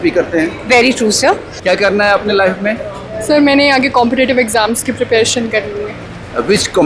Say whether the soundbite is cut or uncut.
cut